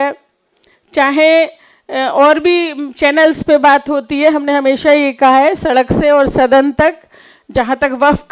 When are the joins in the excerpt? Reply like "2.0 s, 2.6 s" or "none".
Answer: none